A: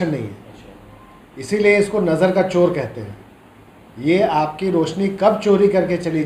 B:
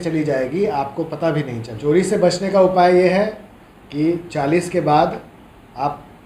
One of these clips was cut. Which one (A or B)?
B